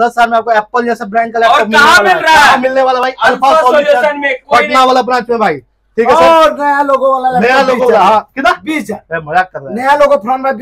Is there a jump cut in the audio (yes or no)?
no